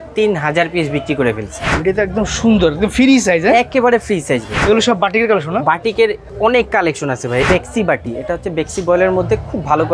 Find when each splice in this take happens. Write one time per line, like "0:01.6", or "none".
0:01.7
0:04.5
0:06.2
0:07.5